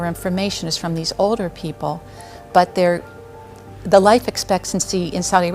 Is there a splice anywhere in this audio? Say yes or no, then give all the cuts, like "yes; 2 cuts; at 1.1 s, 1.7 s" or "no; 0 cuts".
no; 0 cuts